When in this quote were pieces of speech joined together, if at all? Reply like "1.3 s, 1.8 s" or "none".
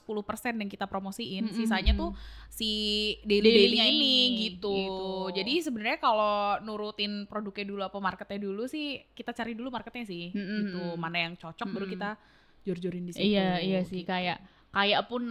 none